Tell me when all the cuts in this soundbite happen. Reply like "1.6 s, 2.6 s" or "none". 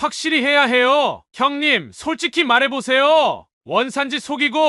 1.2 s